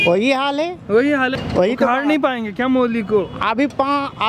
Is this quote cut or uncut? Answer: cut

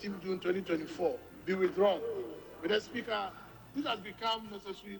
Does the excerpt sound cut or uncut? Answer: cut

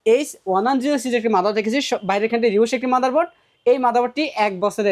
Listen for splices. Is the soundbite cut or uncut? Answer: uncut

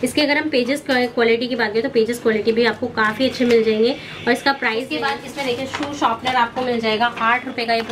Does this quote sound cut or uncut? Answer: cut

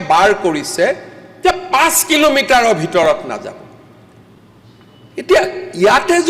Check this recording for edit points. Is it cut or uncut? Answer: uncut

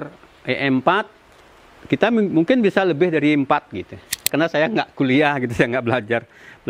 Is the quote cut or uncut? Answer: cut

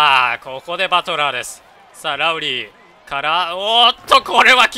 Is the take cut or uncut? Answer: uncut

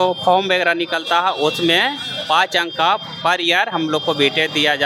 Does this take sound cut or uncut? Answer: uncut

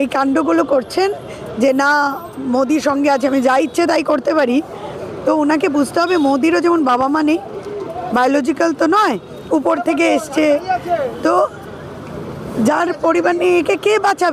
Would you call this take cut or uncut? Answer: uncut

